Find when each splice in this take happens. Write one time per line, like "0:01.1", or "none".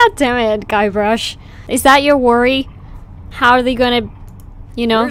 0:01.5

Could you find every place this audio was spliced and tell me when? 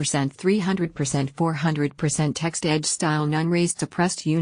none

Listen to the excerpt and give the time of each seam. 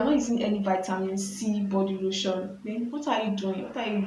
none

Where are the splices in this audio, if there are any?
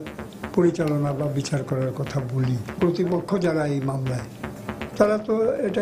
0:02.7

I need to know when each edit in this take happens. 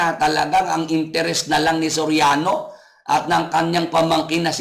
none

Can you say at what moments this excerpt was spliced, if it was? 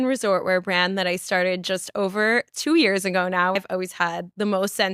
0:03.5

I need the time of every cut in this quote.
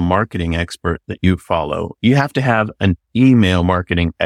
none

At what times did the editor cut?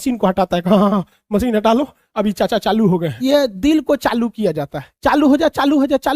0:03.1

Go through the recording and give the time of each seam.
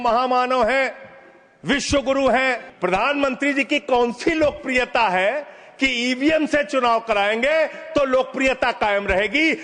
0:02.7

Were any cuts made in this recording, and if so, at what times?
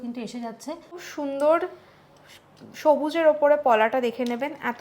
0:01.0

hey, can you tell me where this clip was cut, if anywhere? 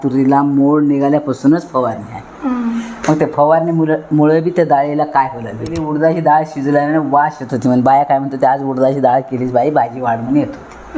0:05.8

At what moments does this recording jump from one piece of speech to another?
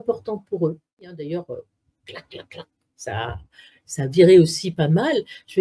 0:01.3

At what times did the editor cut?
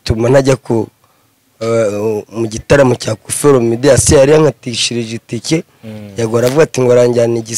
none

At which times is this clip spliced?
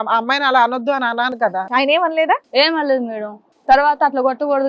0:01.5

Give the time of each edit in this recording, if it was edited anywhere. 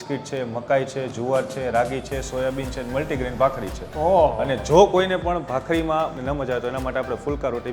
0:06.2

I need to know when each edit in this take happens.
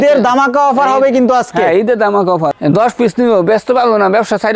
0:02.6

